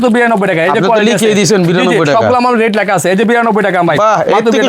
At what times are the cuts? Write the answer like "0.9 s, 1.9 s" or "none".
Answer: none